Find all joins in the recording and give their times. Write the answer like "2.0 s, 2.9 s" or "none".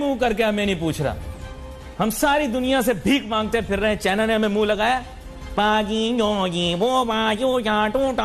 none